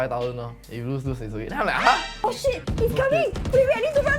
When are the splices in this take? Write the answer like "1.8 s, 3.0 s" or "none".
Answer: 2.2 s